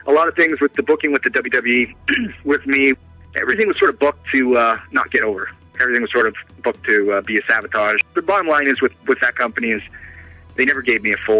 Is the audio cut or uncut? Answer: uncut